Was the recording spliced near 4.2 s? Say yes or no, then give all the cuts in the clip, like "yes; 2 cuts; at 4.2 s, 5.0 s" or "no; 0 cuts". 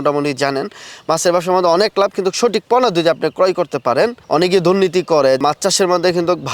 yes; 2 cuts; at 4.2 s, 5.4 s